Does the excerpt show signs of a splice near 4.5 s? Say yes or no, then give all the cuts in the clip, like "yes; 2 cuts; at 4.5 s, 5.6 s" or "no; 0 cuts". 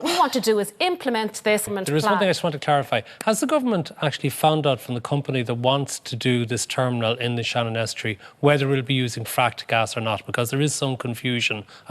no; 1 cut; at 1.7 s